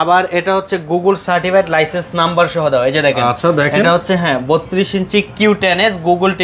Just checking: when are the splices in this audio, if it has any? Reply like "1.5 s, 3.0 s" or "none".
none